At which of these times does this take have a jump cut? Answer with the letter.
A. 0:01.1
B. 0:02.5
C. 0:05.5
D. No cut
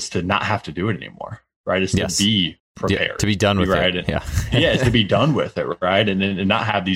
D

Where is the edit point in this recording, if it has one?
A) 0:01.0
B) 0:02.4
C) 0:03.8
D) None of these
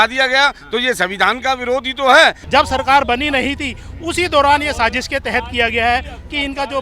B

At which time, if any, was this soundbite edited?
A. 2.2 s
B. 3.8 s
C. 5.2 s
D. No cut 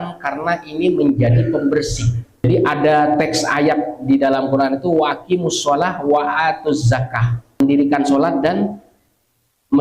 A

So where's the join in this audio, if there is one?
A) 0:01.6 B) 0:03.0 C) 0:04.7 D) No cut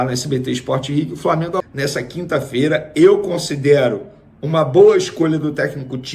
A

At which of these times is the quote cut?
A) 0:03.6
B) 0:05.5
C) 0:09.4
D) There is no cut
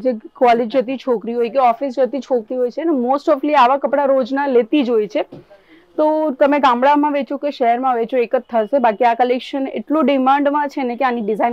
D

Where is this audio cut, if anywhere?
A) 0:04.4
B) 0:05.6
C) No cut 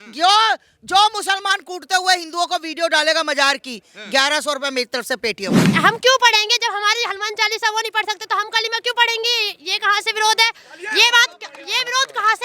B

